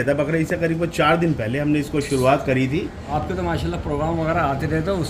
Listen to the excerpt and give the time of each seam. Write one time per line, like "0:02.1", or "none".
0:03.1